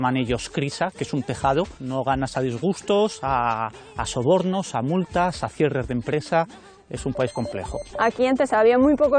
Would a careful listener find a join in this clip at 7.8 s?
yes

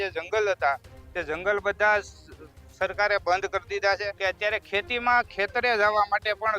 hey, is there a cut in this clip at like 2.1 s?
no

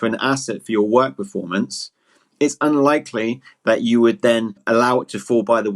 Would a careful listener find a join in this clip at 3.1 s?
no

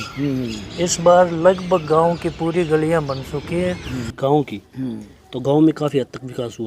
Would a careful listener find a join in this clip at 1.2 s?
no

